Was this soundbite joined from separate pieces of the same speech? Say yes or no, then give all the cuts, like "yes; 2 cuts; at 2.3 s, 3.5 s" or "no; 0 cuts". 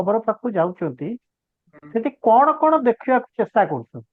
no; 0 cuts